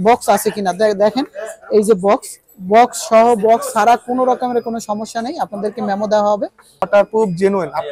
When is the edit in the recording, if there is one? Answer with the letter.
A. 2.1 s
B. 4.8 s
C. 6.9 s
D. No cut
C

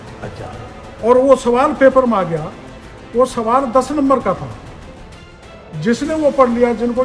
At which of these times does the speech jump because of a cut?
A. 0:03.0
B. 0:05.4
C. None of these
C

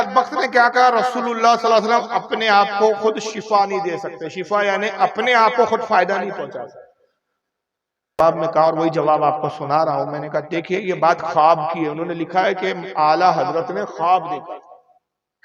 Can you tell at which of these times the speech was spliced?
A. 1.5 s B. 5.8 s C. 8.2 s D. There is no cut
C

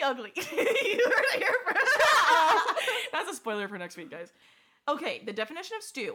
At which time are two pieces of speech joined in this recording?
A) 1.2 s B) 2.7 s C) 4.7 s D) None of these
D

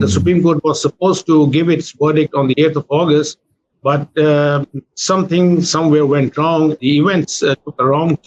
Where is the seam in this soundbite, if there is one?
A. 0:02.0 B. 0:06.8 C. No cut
B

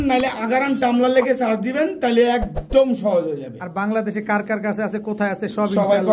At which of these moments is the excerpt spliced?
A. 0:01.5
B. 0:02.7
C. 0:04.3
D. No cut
D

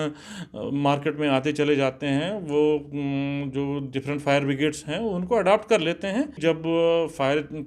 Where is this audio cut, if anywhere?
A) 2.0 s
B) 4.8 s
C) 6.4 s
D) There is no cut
C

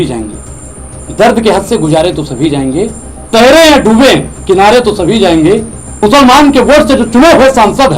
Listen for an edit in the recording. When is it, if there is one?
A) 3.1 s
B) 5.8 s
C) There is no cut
B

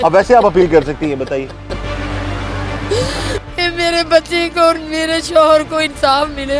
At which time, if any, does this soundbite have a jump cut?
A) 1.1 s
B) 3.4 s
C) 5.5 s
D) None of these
D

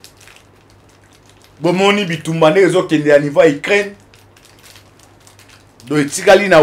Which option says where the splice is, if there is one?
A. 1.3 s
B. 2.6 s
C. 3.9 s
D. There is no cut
D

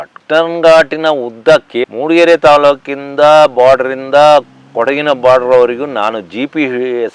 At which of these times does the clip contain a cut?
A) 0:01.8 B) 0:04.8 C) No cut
A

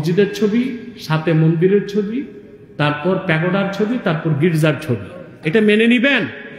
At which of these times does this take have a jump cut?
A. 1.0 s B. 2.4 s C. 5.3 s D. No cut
C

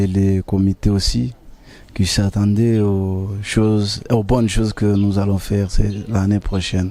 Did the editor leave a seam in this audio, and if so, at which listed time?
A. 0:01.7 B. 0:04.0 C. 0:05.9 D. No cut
D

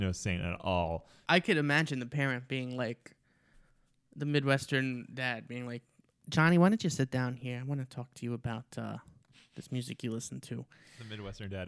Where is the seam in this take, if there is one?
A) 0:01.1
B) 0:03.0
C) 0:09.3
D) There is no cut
A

